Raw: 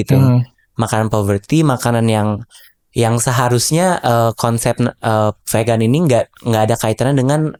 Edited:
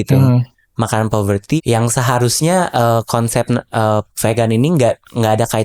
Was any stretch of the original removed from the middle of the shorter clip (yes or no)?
yes